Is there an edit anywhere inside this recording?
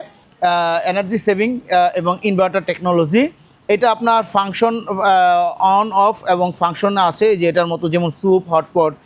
no; 0 cuts

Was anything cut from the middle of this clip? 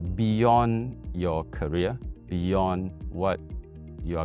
yes; 1 cut; at 1.0 s

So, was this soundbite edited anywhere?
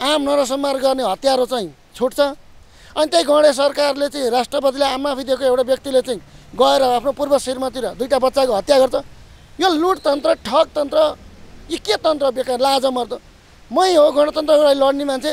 no; 0 cuts

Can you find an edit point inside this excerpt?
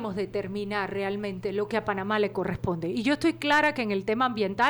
no; 0 cuts

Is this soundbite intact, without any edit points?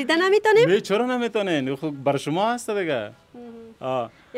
yes; 0 cuts

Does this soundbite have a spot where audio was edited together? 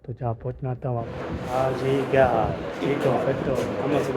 yes; 1 cut; at 1.1 s

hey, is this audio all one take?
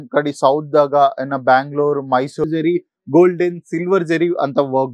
no; 1 cut; at 2.5 s

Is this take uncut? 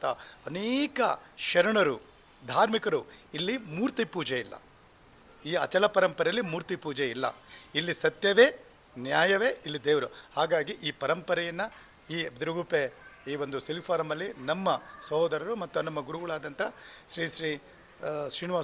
yes; 0 cuts

